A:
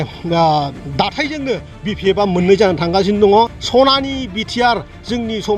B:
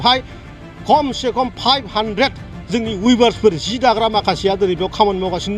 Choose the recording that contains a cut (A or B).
A